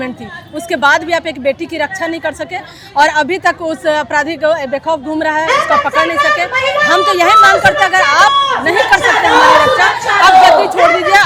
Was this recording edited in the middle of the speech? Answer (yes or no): no